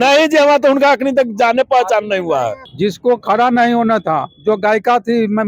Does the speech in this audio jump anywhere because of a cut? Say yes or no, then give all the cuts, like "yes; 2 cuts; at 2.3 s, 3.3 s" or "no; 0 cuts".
yes; 1 cut; at 2.6 s